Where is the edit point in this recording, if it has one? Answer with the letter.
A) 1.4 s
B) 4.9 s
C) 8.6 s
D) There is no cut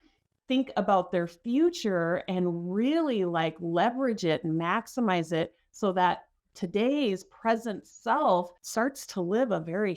C